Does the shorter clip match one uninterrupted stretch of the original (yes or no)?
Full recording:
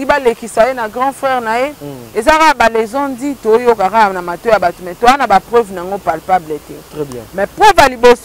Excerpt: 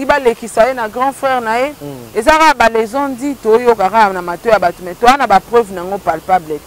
yes